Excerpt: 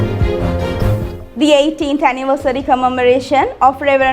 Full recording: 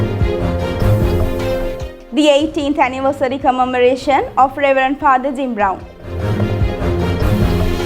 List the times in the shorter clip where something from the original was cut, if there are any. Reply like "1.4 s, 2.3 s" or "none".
1.1 s